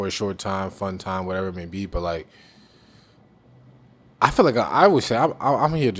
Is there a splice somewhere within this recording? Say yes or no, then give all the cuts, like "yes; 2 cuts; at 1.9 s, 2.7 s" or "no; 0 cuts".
no; 0 cuts